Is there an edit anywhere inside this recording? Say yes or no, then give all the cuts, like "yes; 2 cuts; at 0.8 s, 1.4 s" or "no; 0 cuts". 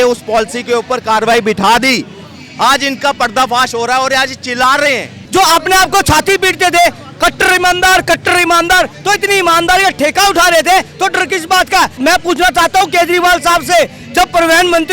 yes; 2 cuts; at 5.2 s, 11.9 s